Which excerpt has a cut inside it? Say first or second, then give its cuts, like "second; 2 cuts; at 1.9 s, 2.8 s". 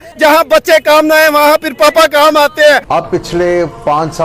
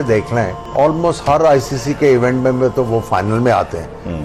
first; 1 cut; at 2.8 s